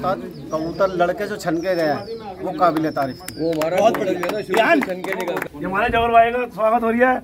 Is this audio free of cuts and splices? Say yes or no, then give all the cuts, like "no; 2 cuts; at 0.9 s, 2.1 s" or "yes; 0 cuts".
no; 1 cut; at 5.4 s